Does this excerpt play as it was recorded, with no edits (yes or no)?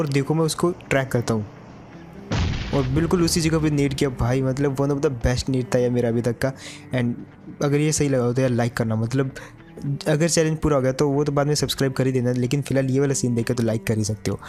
yes